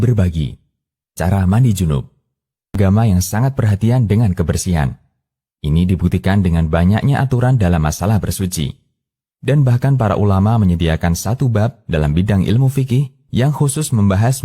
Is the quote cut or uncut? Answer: cut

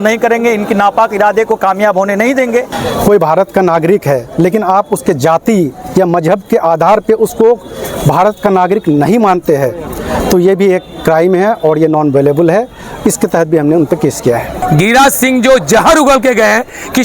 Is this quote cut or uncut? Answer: cut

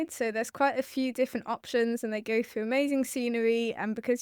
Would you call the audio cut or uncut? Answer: uncut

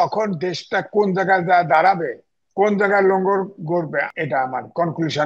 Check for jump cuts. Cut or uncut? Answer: cut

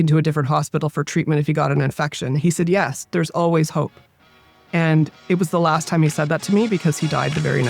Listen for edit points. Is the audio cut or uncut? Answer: uncut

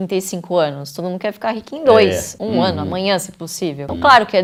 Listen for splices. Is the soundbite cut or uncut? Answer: uncut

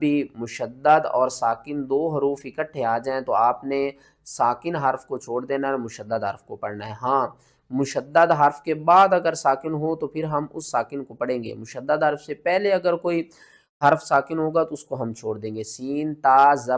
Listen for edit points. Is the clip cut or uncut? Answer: uncut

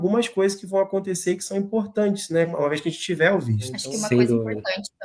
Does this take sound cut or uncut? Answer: cut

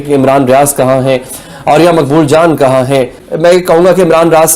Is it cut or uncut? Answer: cut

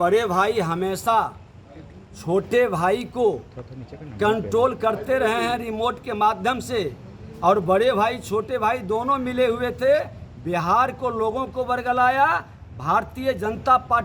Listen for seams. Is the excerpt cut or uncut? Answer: uncut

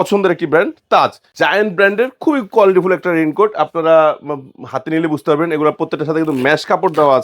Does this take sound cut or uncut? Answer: cut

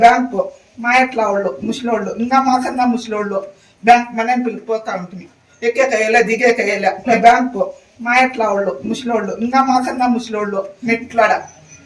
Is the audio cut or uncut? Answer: cut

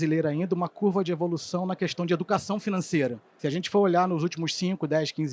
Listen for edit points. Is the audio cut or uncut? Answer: cut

